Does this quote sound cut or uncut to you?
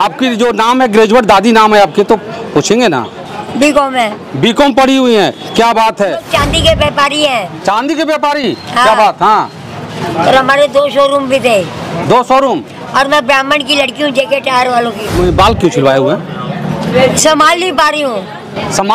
cut